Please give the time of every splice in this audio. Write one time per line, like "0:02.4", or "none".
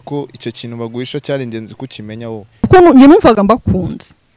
0:02.7